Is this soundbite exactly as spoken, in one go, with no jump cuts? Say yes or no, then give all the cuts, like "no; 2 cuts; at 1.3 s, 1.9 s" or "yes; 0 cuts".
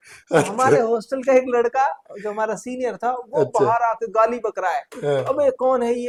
yes; 0 cuts